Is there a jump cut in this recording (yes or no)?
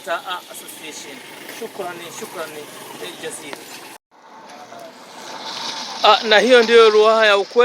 yes